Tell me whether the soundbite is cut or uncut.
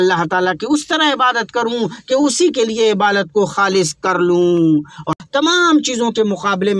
cut